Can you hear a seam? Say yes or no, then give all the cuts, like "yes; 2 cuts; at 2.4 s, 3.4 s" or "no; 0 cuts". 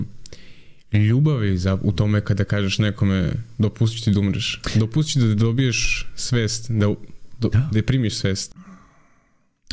yes; 1 cut; at 8.5 s